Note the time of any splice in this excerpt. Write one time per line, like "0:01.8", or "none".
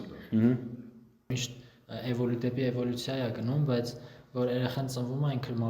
0:01.4